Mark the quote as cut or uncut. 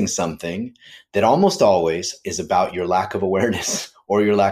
cut